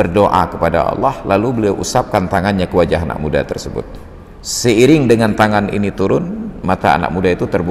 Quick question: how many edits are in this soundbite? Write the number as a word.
zero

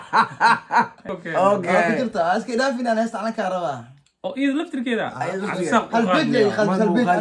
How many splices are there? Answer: one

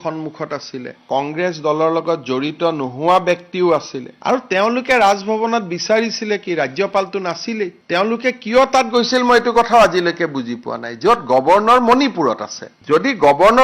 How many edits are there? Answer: zero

